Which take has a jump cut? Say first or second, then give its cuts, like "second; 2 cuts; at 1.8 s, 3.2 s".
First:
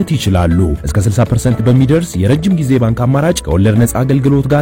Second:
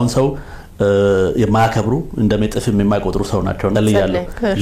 second; 1 cut; at 3.7 s